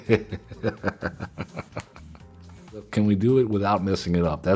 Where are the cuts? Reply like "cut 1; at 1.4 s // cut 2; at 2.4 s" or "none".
cut 1; at 2.9 s

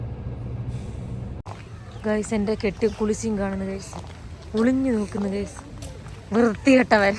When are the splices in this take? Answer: cut 1; at 1.4 s

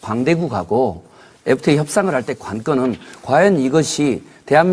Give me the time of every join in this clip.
cut 1; at 1.9 s

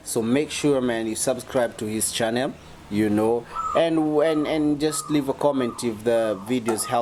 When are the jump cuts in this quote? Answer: none

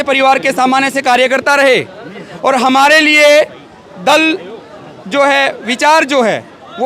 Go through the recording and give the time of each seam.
none

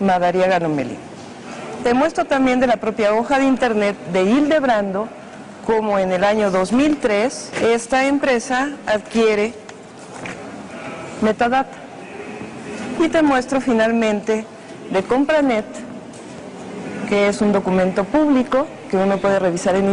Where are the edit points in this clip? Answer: none

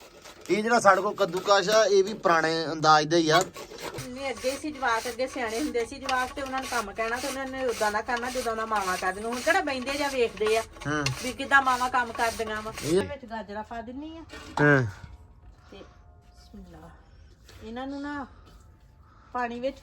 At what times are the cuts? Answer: cut 1; at 4.0 s // cut 2; at 13.0 s

